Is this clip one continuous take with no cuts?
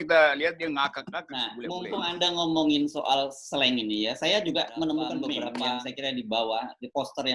no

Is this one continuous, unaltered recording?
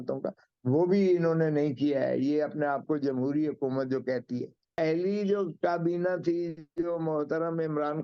no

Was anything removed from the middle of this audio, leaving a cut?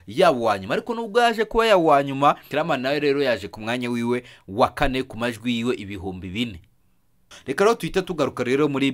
yes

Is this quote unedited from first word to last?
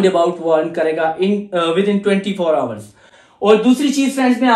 yes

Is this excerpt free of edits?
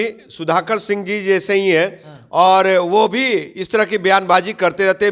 yes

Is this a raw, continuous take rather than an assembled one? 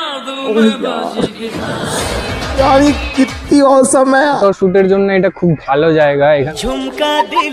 no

